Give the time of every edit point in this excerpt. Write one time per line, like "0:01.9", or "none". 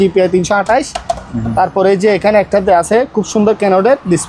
none